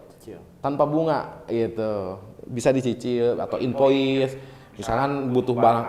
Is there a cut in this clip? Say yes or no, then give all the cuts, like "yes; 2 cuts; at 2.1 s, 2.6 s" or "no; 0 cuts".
no; 0 cuts